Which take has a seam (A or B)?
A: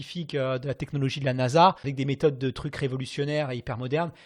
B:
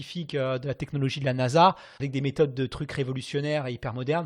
A